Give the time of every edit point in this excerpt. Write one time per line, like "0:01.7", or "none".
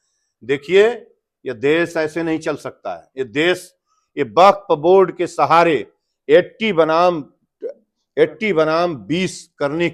none